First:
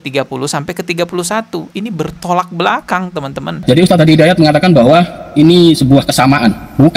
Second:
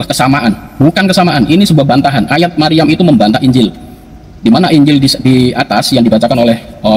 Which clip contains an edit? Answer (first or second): first